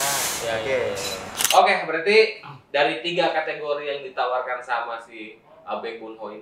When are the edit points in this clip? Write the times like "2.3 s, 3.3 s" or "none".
1.3 s